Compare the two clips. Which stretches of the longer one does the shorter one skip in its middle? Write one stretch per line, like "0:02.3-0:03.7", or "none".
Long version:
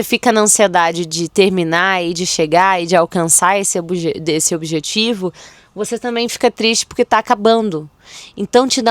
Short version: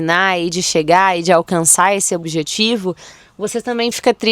0:03.9-0:04.6